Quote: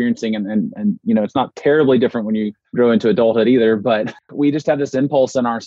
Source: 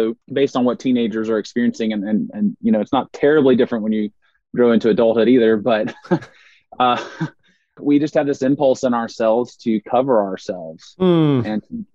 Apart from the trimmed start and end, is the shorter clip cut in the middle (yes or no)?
yes